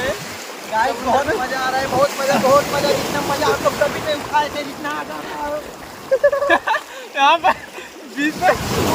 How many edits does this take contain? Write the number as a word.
zero